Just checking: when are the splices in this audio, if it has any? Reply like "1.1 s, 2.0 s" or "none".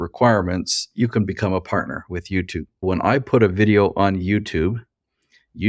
2.8 s

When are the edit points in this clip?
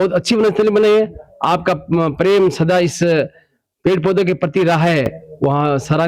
none

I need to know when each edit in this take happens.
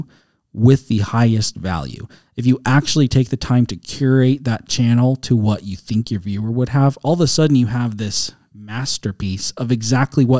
none

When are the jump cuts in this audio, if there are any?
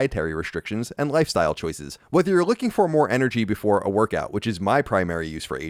none

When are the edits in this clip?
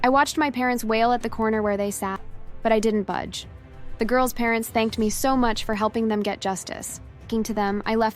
7.2 s

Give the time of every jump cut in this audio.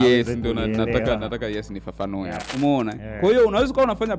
2.4 s

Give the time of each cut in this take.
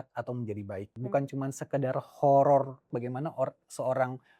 0.9 s, 2.9 s

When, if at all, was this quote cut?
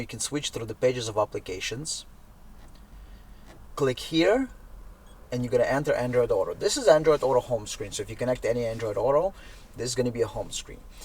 3.7 s

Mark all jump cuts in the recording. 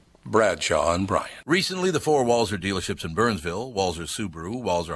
1.3 s

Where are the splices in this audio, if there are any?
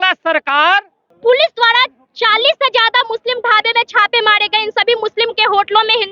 1.0 s

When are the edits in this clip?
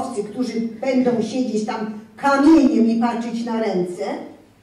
none

